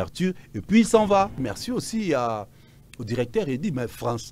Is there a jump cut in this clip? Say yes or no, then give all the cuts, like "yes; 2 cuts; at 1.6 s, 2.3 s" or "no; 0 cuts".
yes; 1 cut; at 1.4 s